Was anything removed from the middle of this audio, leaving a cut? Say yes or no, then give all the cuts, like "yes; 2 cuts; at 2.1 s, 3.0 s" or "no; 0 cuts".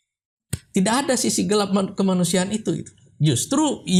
no; 0 cuts